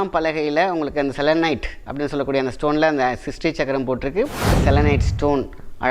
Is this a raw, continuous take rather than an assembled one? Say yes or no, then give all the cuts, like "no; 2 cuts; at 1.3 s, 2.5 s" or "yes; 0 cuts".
no; 1 cut; at 4.6 s